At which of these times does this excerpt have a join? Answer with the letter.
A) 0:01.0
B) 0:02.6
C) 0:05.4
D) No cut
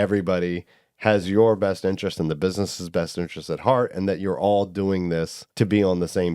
C